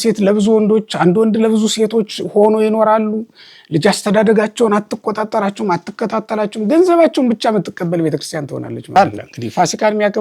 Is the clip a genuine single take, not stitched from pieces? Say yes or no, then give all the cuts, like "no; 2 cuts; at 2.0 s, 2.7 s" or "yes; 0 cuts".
no; 1 cut; at 9.0 s